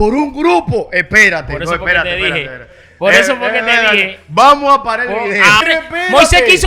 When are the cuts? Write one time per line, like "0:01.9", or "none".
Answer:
0:05.6